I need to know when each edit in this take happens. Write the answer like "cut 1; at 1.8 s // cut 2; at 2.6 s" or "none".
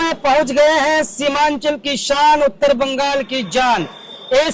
none